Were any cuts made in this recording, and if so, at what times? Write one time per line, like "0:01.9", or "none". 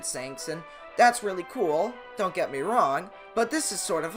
0:02.0
0:03.2